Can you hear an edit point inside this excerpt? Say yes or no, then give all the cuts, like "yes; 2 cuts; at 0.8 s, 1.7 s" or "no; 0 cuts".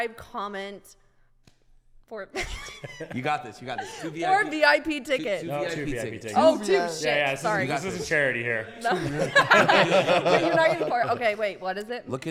no; 0 cuts